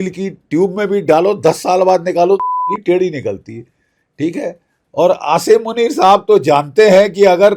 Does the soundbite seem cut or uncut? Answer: uncut